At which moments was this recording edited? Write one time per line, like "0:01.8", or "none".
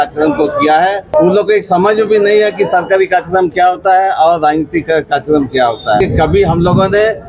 0:01.1
0:06.0